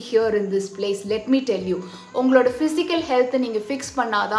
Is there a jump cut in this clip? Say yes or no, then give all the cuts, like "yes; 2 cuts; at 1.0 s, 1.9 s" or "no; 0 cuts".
no; 0 cuts